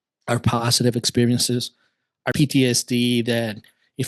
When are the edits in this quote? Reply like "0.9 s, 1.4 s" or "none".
2.3 s